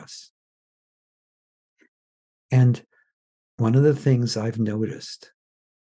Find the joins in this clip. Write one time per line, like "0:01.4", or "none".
0:03.6